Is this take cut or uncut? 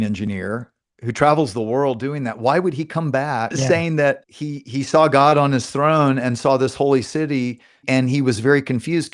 cut